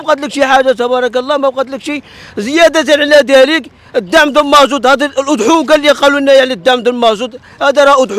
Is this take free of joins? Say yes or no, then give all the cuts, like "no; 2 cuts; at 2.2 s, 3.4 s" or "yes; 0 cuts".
yes; 0 cuts